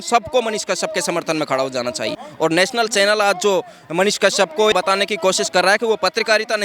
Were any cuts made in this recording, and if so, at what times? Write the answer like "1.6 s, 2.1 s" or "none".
2.2 s, 4.7 s